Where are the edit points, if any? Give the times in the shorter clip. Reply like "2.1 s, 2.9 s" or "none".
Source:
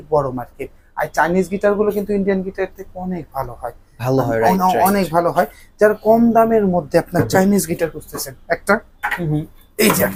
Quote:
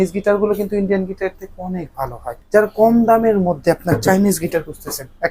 2.3 s